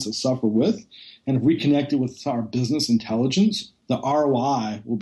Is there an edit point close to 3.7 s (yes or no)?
yes